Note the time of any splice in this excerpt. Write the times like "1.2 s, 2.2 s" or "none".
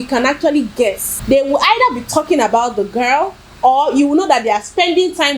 1.1 s